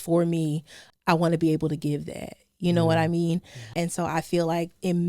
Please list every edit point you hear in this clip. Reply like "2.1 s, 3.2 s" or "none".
0.8 s, 3.7 s